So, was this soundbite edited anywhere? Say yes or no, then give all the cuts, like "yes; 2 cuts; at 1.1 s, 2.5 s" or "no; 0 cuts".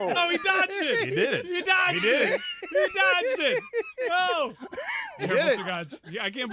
no; 0 cuts